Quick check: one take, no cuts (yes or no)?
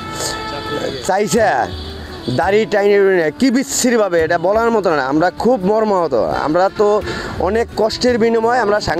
yes